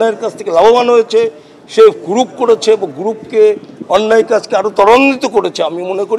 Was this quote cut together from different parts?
no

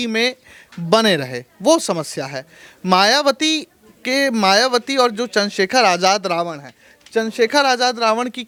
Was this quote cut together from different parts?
no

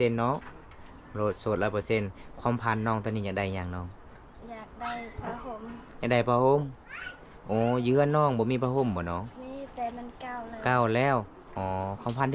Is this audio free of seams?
no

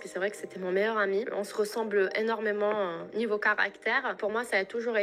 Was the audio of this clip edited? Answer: no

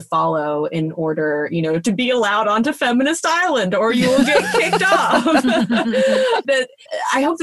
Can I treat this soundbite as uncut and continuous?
no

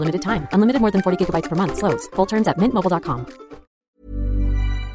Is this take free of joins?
no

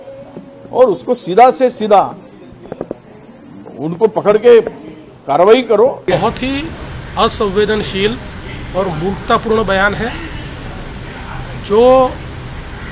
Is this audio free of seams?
no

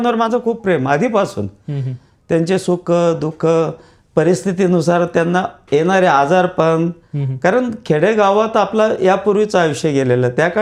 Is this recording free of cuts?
yes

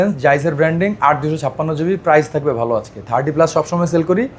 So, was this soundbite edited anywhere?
no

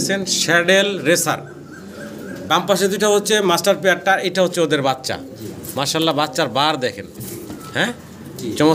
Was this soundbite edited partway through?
no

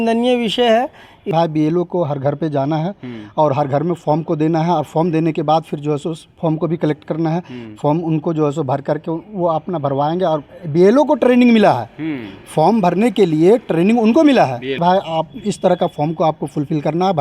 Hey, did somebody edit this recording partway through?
yes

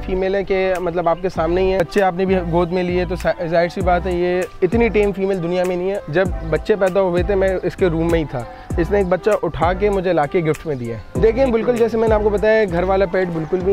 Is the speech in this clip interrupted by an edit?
yes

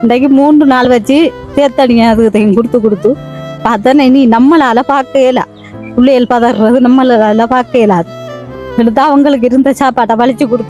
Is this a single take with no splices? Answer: yes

